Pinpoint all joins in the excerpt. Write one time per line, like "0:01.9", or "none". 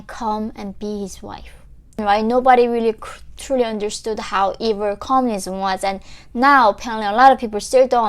0:02.0